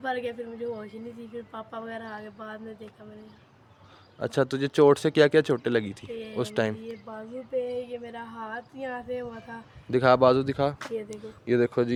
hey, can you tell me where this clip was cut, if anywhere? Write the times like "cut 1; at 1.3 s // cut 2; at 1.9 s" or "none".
none